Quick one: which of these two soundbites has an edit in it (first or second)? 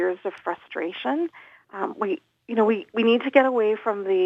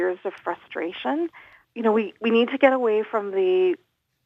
second